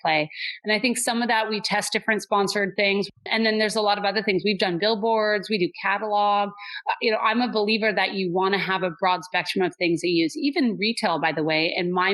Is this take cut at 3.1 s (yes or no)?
yes